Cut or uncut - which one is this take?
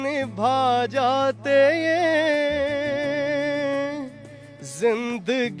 uncut